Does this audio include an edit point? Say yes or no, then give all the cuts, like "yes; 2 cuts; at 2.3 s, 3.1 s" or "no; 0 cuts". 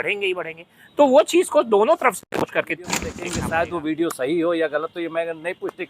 yes; 1 cut; at 3.3 s